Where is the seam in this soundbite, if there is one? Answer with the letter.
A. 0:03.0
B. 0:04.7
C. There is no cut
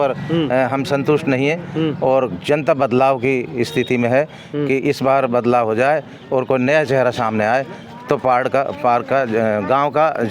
C